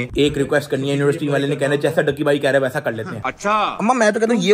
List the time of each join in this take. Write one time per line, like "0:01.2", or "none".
0:03.4